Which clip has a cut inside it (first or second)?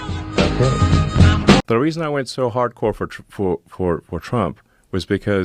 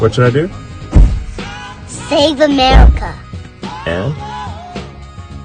first